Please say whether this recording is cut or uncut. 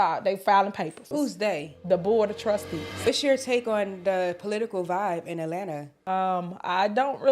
cut